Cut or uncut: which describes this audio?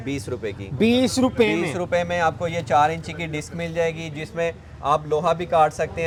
uncut